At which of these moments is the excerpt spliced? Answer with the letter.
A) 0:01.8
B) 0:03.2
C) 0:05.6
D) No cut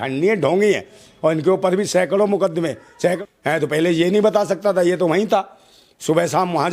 B